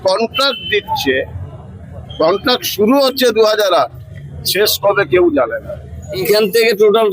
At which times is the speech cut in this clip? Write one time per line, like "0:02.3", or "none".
0:06.2